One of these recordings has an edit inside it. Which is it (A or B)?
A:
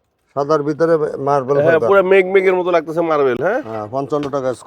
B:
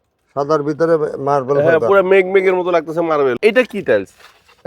B